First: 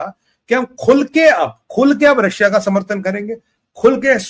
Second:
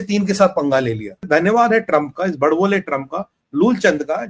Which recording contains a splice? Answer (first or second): second